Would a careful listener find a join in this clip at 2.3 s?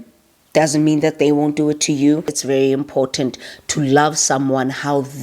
yes; 1 cut; at 2.3 s

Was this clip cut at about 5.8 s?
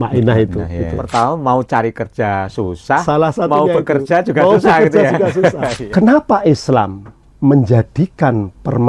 yes; 2 cuts; at 0.9 s, 5.8 s

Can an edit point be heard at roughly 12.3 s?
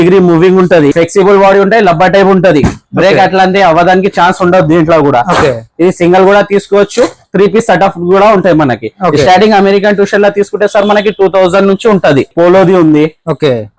yes; 2 cuts; at 0.9 s, 12.3 s

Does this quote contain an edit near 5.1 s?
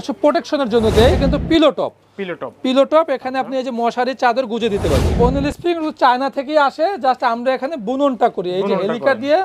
yes; 2 cuts; at 1.2 s, 5.1 s

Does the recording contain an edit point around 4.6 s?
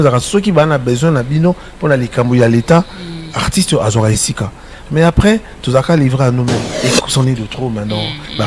no; 1 cut; at 6.7 s

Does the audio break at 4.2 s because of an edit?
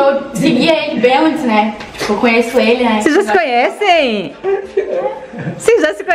yes; 1 cut; at 4.2 s

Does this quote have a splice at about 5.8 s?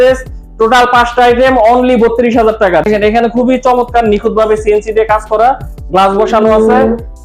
no; 1 cut; at 2.8 s

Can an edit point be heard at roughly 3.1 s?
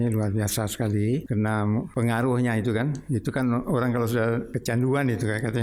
no; 2 cuts; at 1.8 s, 4.5 s

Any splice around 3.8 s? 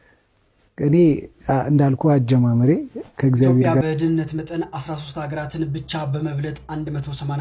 yes; 1 cut; at 3.8 s

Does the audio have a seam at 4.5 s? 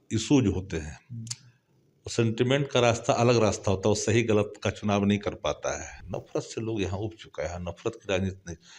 no; 1 cut; at 5.9 s

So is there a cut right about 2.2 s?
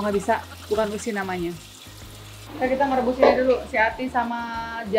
yes; 1 cut; at 2.2 s

